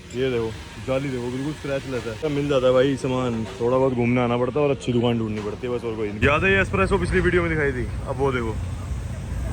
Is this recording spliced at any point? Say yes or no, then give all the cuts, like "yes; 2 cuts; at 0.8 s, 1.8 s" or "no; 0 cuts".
yes; 2 cuts; at 2.2 s, 6.1 s